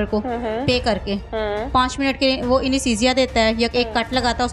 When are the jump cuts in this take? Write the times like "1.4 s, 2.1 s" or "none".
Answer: none